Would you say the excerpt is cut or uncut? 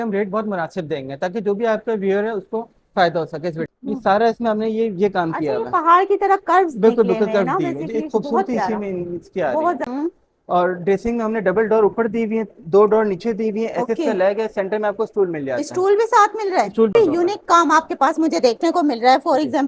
cut